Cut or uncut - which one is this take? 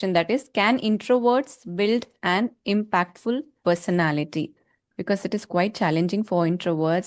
uncut